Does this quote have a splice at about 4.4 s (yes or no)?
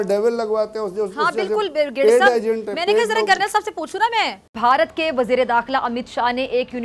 yes